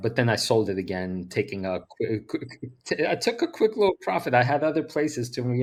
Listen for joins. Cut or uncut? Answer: uncut